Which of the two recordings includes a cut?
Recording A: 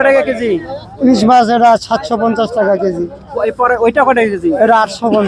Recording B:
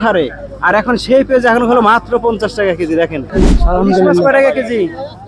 B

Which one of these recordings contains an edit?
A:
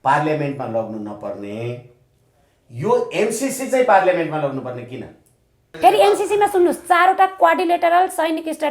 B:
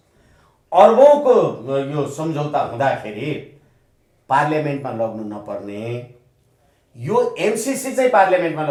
A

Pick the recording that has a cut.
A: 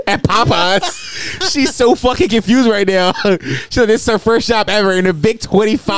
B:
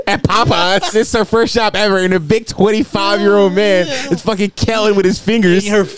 B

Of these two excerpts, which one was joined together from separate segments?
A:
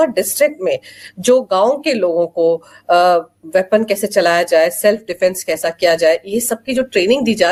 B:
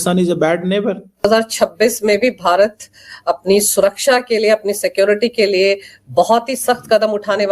B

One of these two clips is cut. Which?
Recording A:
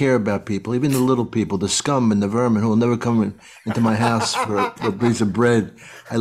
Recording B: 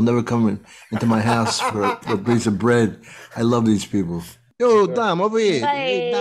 B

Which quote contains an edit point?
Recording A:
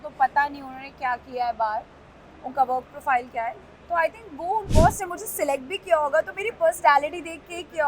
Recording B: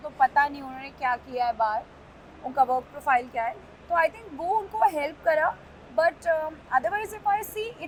A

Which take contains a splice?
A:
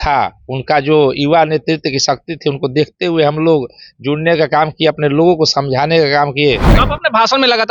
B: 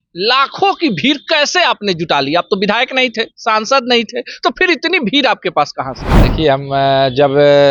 A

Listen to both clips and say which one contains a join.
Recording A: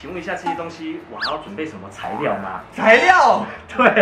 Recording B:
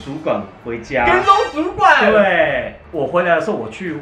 B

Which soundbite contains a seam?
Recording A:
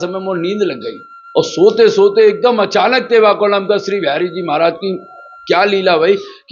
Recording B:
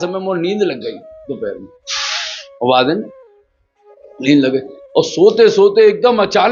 A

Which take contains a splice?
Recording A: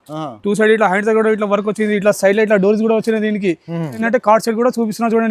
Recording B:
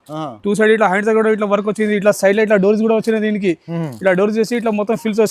A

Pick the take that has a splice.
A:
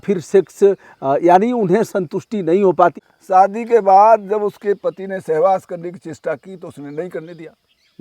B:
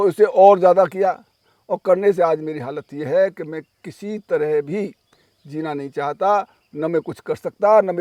A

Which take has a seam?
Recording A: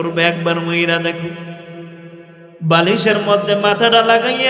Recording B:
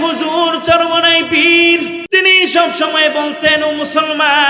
B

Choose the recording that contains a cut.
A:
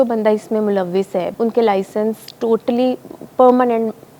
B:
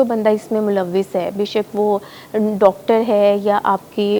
A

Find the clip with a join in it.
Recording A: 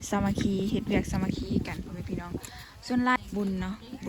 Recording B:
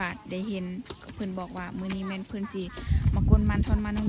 A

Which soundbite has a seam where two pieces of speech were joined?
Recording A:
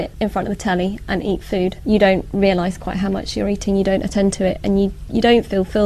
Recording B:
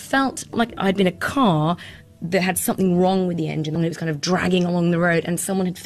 B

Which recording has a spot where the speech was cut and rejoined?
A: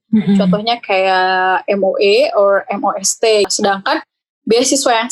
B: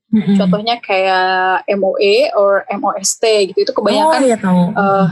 A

